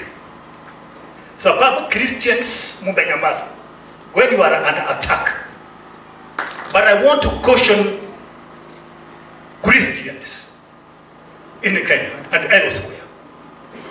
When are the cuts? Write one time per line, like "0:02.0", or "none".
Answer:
0:06.5